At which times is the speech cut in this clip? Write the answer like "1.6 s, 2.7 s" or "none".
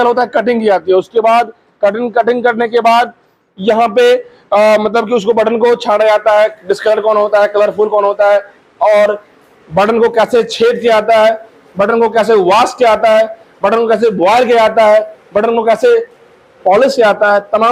none